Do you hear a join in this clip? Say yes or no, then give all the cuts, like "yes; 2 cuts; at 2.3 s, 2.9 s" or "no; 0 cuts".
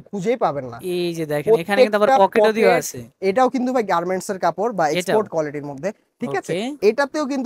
no; 0 cuts